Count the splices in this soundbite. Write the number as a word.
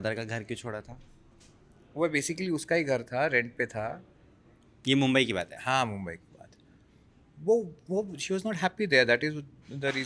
zero